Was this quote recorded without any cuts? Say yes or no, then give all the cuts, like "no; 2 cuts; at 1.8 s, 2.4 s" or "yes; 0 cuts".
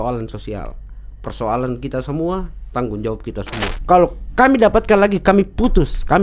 no; 1 cut; at 3.7 s